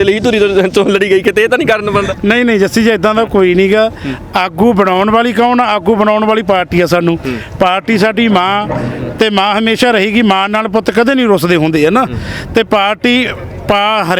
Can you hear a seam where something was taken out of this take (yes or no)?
no